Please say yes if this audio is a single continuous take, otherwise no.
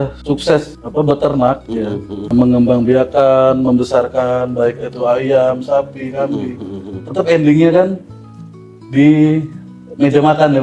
yes